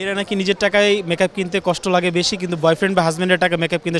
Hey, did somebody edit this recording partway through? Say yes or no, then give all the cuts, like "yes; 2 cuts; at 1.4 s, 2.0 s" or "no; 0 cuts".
no; 0 cuts